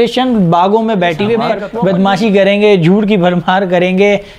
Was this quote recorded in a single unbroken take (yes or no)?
no